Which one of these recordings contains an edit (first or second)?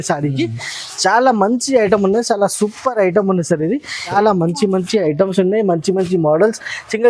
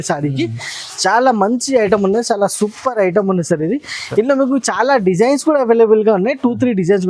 first